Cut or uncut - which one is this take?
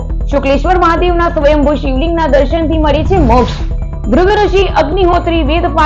uncut